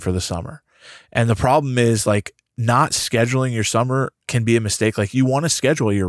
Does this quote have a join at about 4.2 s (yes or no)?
yes